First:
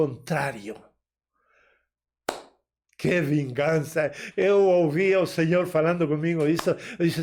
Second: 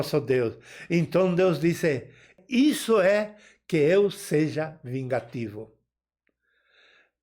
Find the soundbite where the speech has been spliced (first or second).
second